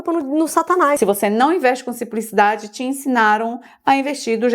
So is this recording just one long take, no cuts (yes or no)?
no